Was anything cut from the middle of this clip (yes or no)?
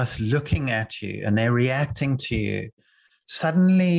no